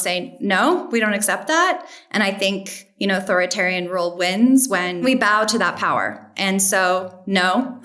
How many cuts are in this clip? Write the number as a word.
one